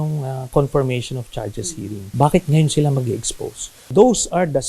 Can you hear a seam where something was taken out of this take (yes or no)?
yes